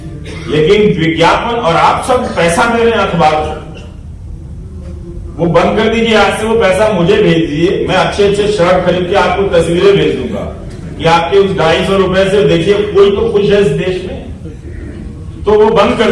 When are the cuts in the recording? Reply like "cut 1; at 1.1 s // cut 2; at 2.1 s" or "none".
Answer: none